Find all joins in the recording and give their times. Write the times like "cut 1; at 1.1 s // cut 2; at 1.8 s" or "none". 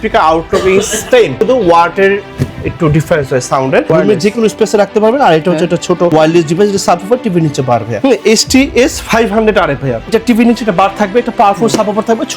cut 1; at 1.3 s // cut 2; at 3.9 s // cut 3; at 6.1 s // cut 4; at 7.9 s // cut 5; at 10.1 s